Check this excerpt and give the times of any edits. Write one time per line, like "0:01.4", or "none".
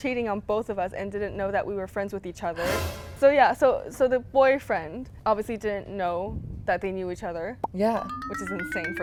none